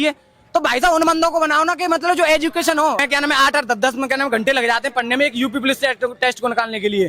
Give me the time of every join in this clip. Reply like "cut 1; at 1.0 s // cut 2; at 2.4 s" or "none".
cut 1; at 3.0 s